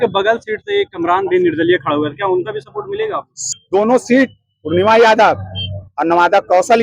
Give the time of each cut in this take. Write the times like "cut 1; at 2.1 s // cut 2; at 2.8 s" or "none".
cut 1; at 3.5 s